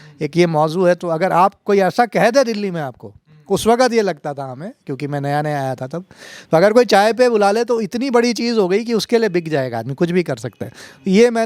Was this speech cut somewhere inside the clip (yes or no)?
no